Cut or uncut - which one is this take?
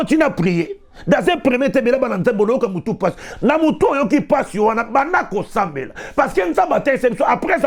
uncut